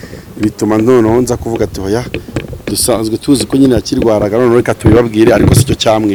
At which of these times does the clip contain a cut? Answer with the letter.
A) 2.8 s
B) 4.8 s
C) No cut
C